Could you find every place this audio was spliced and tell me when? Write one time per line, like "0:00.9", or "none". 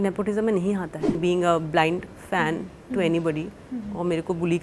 0:01.2